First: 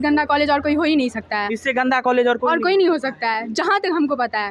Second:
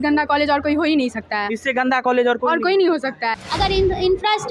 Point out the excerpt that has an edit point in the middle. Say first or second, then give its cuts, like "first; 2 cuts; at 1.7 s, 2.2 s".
second; 1 cut; at 3.3 s